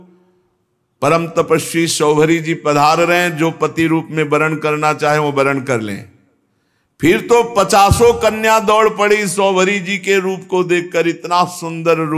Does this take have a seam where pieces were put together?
no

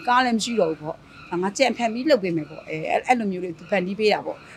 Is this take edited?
no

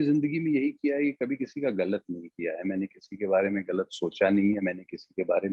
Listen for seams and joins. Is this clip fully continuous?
yes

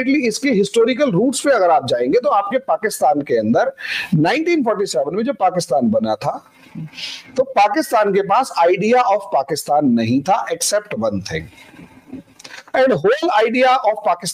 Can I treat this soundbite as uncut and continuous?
yes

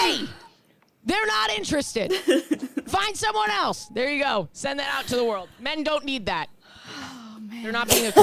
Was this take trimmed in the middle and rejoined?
no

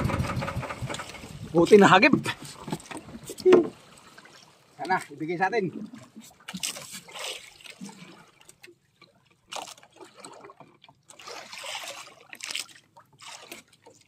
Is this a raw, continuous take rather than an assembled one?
no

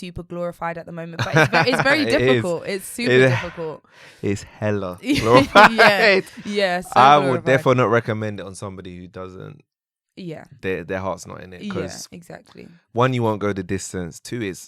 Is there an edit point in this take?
no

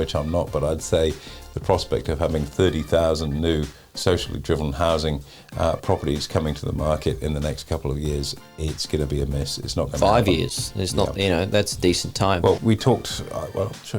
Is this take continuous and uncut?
no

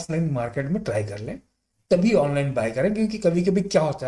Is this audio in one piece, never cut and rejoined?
yes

